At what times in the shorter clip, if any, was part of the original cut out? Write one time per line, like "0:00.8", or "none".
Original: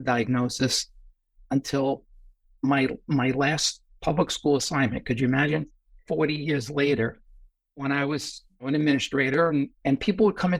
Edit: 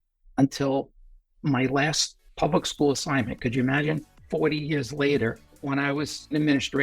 0:01.3
0:04.1
0:05.9